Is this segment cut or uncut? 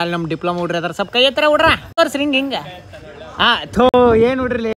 cut